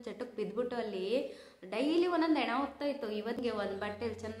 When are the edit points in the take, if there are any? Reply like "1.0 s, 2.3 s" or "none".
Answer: 3.4 s

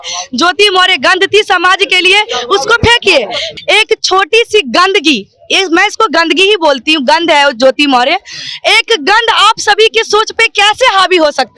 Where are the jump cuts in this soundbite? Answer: 3.4 s

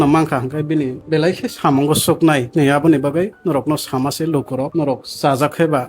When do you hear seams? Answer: 1.0 s, 2.5 s, 4.7 s

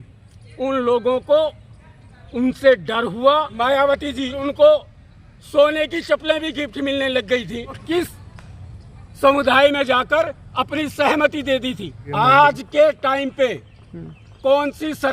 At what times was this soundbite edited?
3.5 s, 4.4 s, 7.8 s, 12.1 s

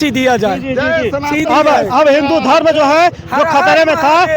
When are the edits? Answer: none

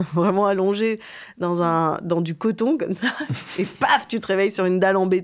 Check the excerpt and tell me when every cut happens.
none

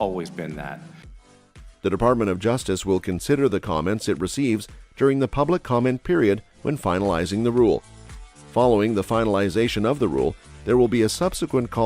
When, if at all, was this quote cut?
none

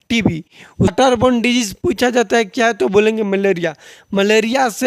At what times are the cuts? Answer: 0.9 s

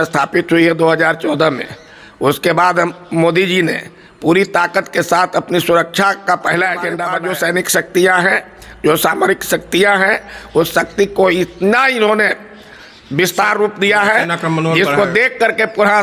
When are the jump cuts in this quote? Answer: 7.1 s

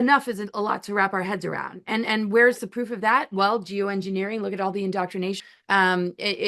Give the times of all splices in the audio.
5.4 s

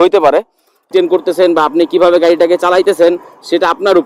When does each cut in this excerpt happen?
0.9 s

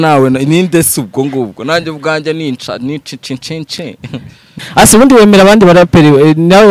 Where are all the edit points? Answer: 4.4 s

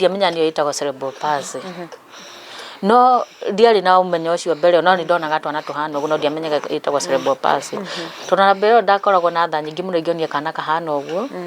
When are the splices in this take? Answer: none

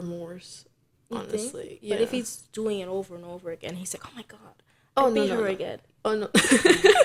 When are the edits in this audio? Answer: none

